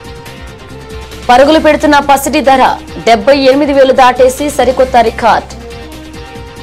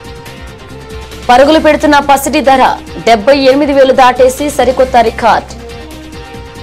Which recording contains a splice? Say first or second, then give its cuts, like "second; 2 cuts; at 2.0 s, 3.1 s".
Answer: first; 1 cut; at 5.5 s